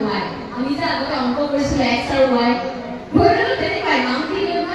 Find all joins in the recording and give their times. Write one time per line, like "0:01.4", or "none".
none